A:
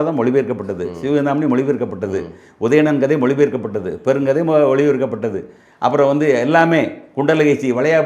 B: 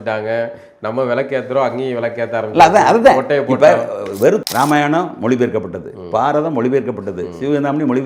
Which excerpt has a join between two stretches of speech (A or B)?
B